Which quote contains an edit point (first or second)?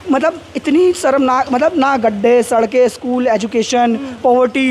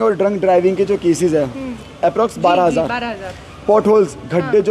second